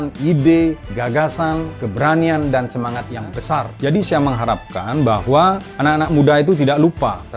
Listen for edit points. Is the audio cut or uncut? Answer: cut